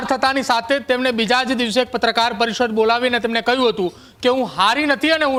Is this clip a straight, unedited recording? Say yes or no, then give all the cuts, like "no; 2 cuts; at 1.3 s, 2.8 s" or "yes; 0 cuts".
yes; 0 cuts